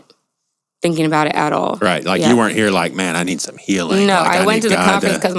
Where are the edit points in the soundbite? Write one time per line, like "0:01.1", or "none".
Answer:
none